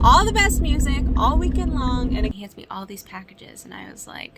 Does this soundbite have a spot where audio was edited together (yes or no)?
yes